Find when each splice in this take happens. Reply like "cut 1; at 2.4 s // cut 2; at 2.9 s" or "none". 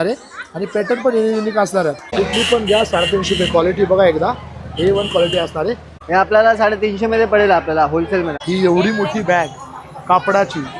cut 1; at 2.1 s // cut 2; at 6.0 s // cut 3; at 8.3 s